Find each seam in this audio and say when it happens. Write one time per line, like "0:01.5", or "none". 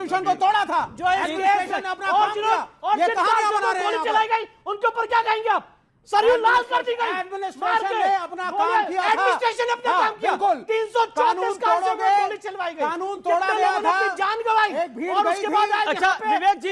none

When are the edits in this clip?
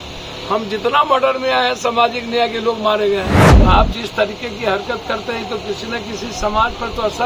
0:03.4

